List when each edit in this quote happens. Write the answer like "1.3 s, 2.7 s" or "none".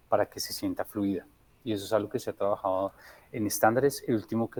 none